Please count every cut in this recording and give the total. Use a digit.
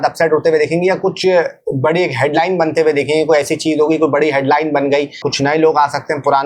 1